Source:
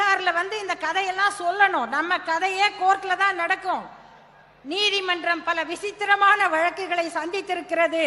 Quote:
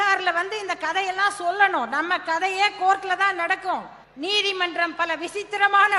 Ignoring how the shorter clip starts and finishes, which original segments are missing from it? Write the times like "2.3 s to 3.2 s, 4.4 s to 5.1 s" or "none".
4.0 s to 4.5 s